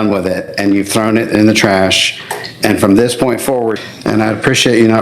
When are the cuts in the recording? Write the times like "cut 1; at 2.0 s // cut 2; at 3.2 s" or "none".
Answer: cut 1; at 3.7 s